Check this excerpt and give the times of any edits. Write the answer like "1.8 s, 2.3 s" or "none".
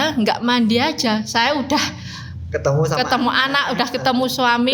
none